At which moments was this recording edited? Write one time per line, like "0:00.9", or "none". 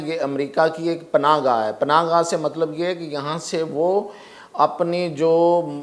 none